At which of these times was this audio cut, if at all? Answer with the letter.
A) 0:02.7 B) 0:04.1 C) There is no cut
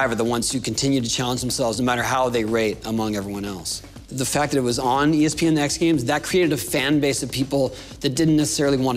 B